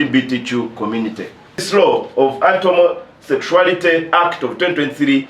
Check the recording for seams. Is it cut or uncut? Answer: cut